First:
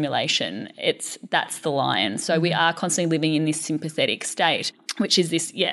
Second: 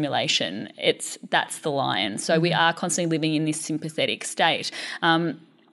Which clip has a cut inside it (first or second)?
first